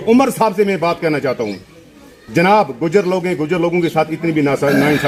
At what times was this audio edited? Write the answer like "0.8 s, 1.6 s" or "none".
none